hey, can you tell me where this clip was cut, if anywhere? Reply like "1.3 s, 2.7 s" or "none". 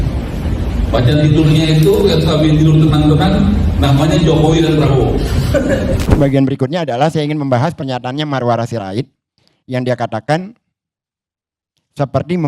5.9 s